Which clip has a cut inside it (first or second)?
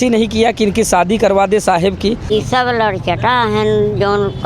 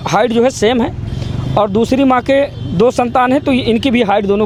first